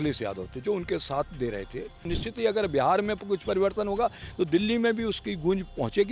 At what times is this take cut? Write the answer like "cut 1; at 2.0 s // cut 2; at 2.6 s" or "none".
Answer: cut 1; at 2.1 s